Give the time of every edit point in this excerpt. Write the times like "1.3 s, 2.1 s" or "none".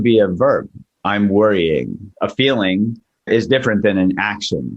2.1 s, 3.3 s